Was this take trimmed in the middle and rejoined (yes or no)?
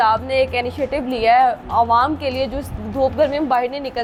no